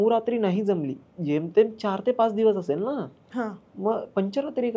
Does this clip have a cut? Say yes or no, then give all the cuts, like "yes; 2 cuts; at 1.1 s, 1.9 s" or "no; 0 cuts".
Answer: no; 0 cuts